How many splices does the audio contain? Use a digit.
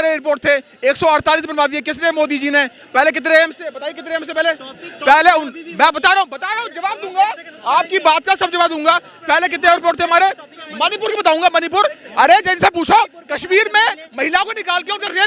0